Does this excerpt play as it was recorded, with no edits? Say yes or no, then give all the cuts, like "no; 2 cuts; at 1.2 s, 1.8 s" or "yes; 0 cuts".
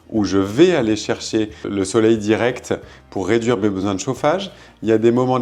no; 1 cut; at 1.6 s